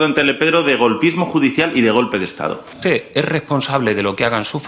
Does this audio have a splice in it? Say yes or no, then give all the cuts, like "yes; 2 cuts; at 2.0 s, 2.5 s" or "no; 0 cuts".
yes; 1 cut; at 2.8 s